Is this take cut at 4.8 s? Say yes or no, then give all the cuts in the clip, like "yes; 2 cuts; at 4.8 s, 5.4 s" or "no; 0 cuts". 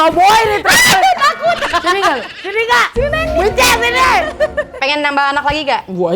yes; 1 cut; at 4.8 s